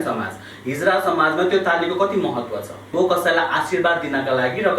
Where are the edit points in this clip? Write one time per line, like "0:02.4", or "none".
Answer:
0:02.9